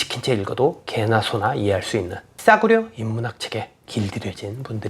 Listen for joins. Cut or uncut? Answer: cut